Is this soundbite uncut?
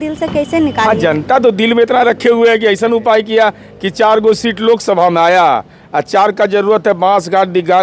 yes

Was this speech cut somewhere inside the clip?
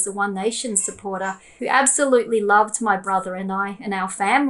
yes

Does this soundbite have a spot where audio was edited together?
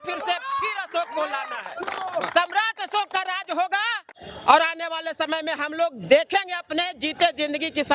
no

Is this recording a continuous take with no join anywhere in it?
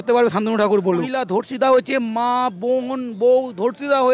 no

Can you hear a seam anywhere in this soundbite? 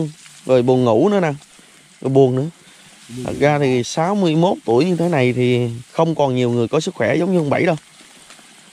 no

